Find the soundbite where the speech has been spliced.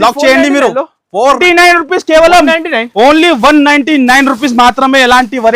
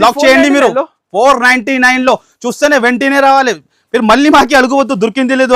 first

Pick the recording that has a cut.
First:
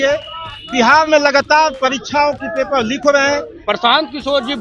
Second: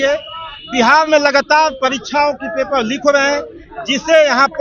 first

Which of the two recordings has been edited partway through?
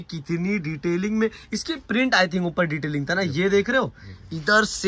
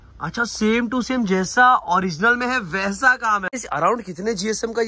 second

